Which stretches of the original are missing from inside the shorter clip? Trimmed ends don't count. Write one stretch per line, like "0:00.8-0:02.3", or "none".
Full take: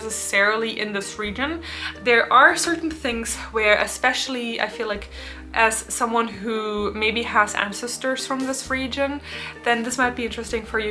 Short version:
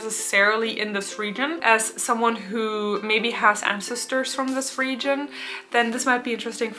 0:01.6-0:05.5